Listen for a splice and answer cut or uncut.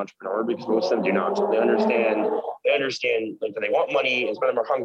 uncut